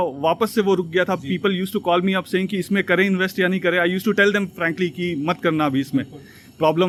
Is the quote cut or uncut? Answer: uncut